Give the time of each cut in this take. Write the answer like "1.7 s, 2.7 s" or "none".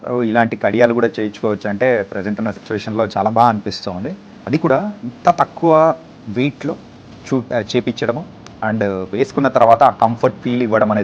none